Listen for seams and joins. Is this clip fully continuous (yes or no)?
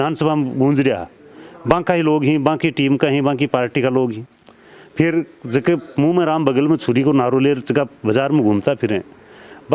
yes